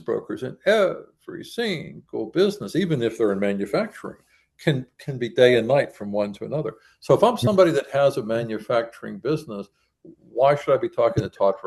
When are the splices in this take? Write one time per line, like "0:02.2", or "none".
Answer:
none